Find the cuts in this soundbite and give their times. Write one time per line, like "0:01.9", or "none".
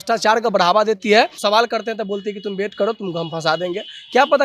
0:01.4